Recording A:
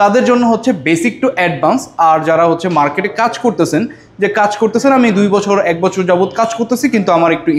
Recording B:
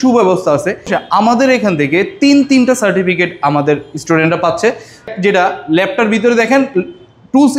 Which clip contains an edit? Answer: B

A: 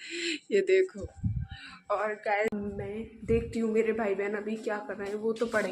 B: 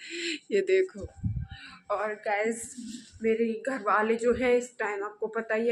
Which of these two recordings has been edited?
A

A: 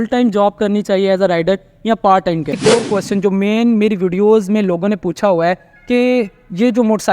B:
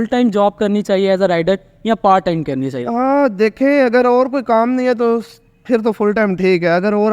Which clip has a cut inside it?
A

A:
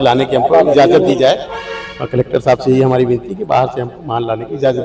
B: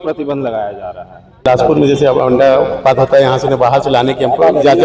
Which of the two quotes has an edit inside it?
B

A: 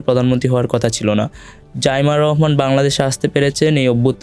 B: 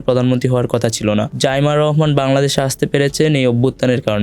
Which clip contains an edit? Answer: B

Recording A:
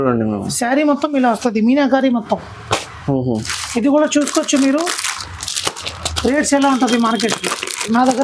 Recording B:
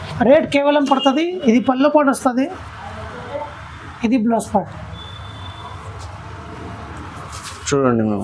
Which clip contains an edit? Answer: B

